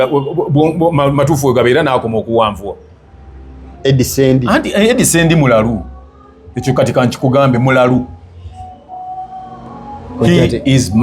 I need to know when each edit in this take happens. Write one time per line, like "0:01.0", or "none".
0:03.7